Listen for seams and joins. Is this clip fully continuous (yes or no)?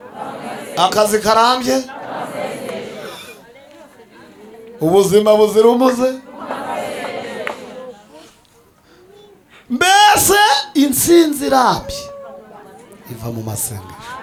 yes